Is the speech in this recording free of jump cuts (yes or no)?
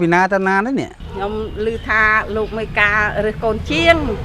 yes